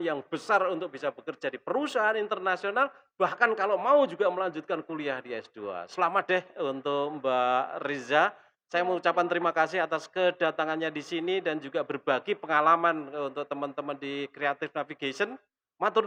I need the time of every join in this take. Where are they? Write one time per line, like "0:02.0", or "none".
none